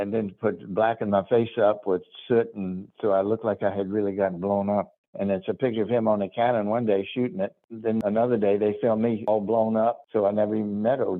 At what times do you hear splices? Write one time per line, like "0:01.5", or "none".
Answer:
0:05.0
0:07.9
0:09.3
0:10.0